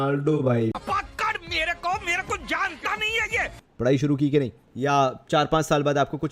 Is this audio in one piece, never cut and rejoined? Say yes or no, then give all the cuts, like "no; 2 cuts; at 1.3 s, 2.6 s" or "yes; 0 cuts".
no; 1 cut; at 4.7 s